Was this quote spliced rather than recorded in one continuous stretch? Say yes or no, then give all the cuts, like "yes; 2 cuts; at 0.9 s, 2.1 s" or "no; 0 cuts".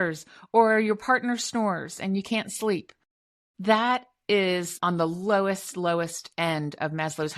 no; 0 cuts